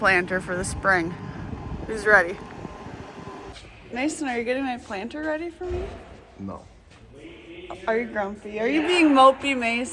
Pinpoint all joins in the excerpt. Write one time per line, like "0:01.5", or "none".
0:03.6